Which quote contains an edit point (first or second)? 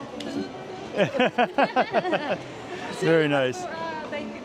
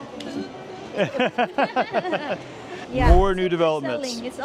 second